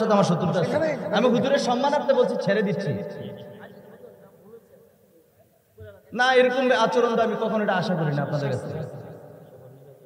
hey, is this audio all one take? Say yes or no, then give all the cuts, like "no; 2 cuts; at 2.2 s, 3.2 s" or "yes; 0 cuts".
yes; 0 cuts